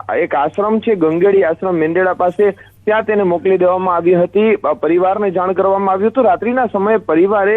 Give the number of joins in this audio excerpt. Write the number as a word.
one